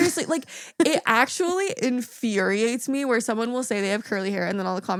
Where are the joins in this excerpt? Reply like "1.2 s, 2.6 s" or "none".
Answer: none